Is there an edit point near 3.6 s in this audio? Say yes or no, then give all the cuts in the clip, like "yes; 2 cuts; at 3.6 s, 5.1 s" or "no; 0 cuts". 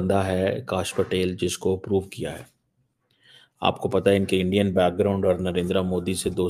no; 0 cuts